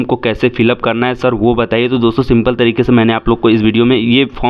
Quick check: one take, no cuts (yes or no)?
yes